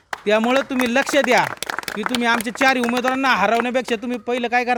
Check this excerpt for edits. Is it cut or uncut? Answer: uncut